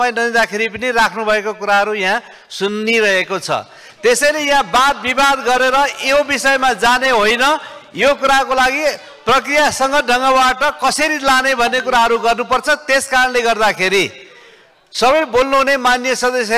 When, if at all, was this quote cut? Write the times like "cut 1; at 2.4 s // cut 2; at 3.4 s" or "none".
none